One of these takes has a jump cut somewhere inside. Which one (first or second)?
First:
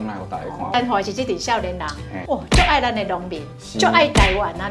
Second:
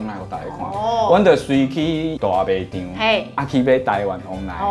first